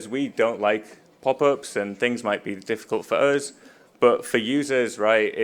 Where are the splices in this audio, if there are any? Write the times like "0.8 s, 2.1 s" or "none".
none